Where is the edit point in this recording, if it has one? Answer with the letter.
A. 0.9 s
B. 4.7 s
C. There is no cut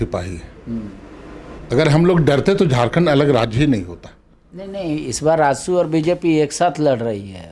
C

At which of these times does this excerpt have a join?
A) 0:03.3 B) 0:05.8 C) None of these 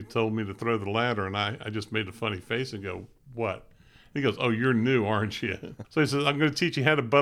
B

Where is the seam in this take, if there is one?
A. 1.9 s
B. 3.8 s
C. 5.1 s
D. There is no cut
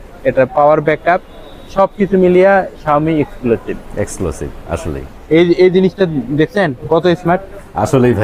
C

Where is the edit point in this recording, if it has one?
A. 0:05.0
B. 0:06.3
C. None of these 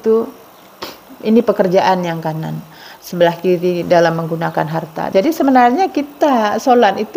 A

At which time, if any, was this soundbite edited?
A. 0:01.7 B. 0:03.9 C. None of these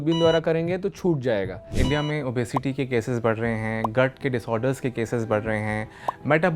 A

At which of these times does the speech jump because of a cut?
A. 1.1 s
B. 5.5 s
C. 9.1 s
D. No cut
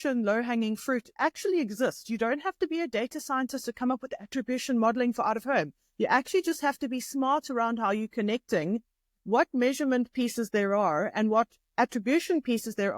A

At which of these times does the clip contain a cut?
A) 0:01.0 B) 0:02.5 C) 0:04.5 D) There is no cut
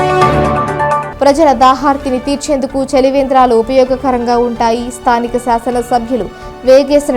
A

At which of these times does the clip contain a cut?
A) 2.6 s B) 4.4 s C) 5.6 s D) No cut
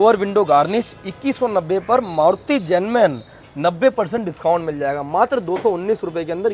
D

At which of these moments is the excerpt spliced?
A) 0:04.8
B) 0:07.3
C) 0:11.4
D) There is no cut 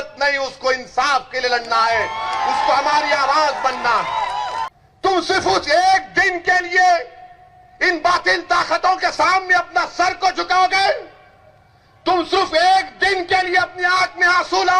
A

